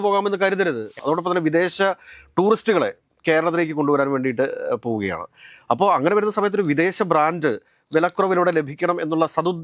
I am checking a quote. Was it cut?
yes; 1 cut; at 0.9 s

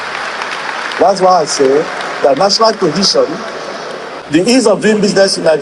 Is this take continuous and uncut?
no; 1 cut; at 4.1 s

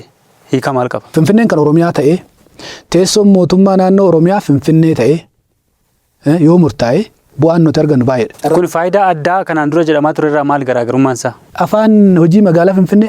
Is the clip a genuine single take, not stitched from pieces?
no; 3 cuts; at 1.1 s, 8.4 s, 11.5 s

